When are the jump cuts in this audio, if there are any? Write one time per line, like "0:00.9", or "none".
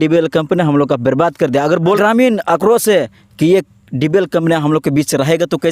0:02.0